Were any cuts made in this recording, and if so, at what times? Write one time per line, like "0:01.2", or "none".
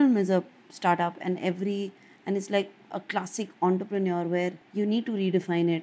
0:04.6